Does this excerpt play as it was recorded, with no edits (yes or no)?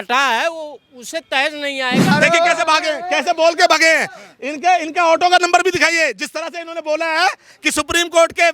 no